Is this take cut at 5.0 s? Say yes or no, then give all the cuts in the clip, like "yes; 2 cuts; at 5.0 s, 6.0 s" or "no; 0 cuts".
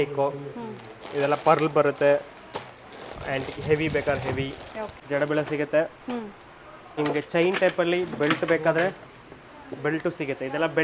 yes; 2 cuts; at 5.0 s, 7.0 s